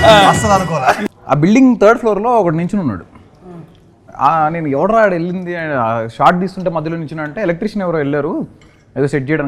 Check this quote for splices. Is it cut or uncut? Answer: cut